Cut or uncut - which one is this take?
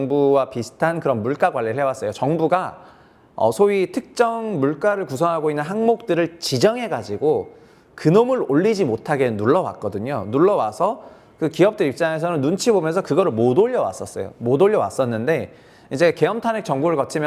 uncut